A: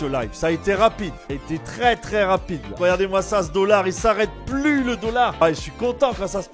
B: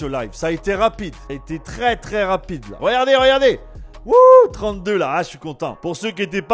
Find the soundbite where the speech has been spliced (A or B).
A